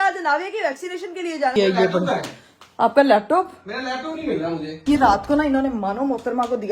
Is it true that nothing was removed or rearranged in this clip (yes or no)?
no